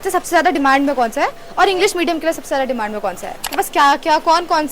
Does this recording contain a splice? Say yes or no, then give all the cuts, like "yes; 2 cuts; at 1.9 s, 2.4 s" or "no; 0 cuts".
yes; 1 cut; at 3.5 s